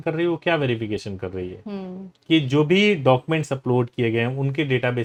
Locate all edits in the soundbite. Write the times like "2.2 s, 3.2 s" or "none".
none